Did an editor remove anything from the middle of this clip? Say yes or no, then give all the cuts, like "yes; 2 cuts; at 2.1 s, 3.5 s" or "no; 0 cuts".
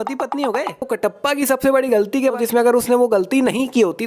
yes; 2 cuts; at 0.9 s, 2.4 s